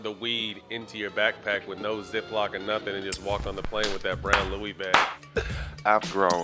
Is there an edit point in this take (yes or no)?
yes